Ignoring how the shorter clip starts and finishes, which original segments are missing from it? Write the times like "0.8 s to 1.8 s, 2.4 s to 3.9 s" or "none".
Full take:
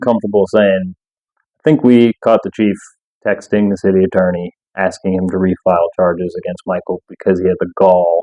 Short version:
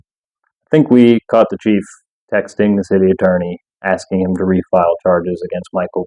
none